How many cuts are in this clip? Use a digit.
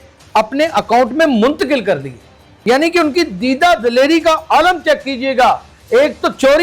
1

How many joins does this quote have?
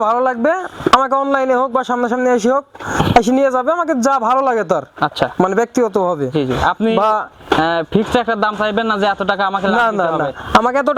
0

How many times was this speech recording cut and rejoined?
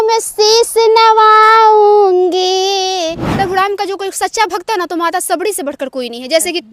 1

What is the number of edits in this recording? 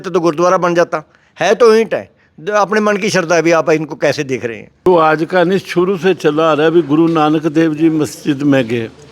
1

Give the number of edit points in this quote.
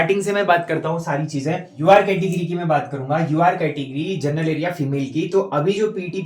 1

